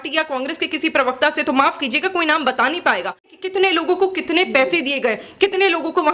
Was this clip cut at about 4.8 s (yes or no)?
no